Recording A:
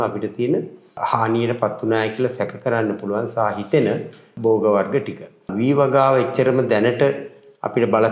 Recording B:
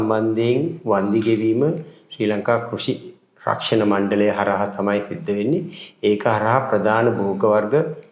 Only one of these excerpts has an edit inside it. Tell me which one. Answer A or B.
A